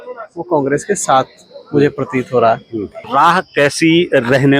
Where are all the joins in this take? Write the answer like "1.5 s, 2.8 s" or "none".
3.0 s